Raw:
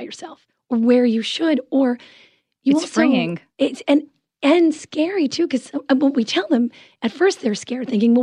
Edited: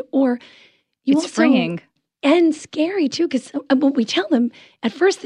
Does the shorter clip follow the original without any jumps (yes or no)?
no